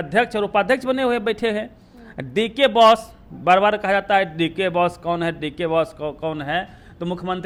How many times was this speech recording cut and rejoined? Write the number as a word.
zero